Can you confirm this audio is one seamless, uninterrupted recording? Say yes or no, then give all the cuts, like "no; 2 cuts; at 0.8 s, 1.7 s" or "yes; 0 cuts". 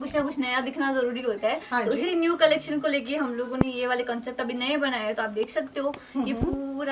yes; 0 cuts